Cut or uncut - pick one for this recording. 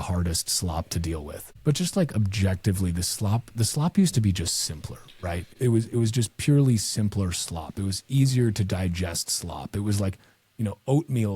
cut